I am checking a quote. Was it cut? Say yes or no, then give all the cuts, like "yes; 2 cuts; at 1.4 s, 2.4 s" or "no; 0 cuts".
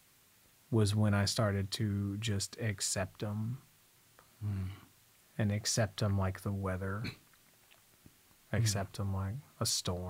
no; 0 cuts